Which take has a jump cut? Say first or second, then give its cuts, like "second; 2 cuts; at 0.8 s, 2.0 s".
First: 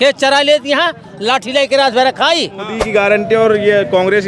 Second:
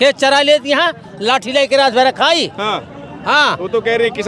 first; 1 cut; at 2.7 s